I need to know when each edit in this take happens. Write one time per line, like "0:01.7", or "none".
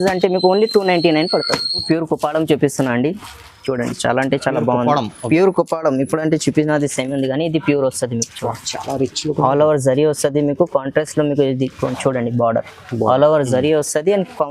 0:01.8